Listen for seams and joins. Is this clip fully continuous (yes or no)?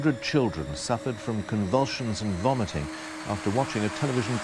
yes